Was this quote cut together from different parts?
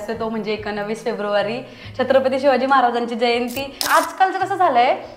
yes; 1 cut; at 3.8 s

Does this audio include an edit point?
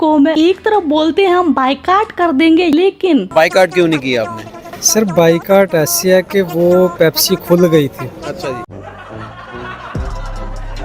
no; 0 cuts

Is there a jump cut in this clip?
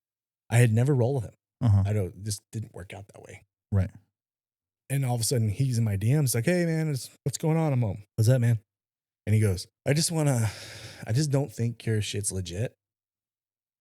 yes; 3 cuts; at 7.1 s, 8.0 s, 9.7 s

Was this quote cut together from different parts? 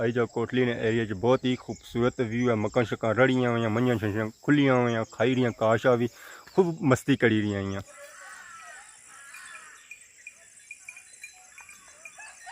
yes; 1 cut; at 7.9 s

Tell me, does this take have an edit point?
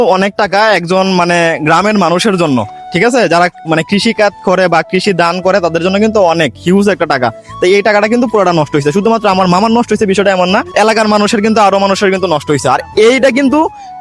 yes; 1 cut; at 10.7 s

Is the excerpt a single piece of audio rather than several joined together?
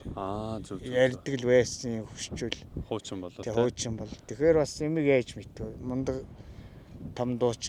yes; 0 cuts

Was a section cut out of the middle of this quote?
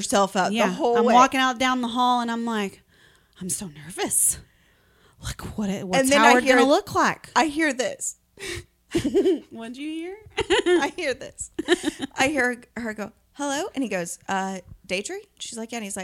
no; 0 cuts

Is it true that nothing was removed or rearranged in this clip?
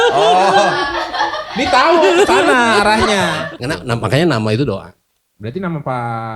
no; 1 cut; at 3.4 s

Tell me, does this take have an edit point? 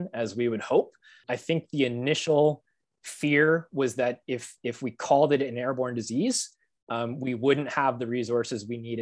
yes; 1 cut; at 1.2 s

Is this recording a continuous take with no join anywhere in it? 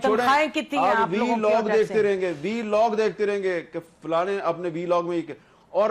yes; 0 cuts

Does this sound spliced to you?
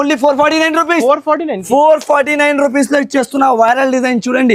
no; 0 cuts

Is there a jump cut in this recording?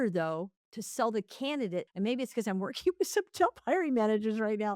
yes; 1 cut; at 1.9 s

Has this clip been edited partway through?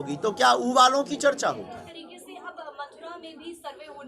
yes; 1 cut; at 2.0 s

